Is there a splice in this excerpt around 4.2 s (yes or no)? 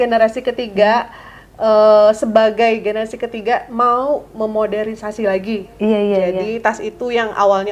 no